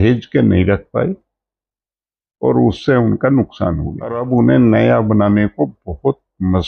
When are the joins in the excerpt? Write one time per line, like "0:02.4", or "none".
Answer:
0:04.2